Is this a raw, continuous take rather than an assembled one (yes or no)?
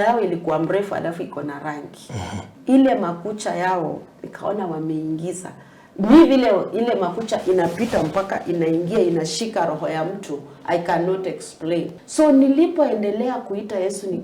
no